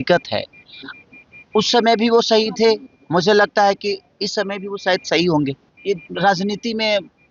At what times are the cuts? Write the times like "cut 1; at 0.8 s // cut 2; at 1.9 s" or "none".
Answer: cut 1; at 5.7 s